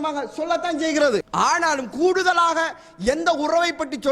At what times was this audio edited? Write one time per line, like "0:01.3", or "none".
0:01.3